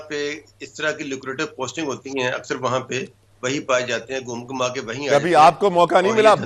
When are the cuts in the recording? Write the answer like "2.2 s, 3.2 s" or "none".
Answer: none